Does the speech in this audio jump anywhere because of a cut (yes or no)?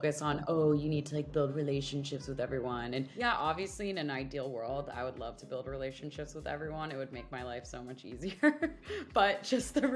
yes